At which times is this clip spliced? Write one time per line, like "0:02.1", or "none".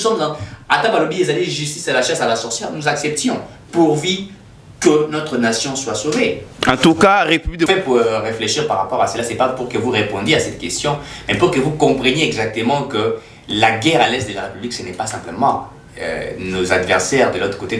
0:07.7